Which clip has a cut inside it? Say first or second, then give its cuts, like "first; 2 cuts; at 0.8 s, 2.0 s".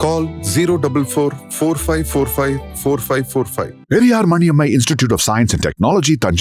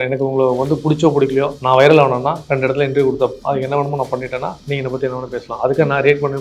second; 4 cuts; at 1.6 s, 2.4 s, 3.4 s, 4.6 s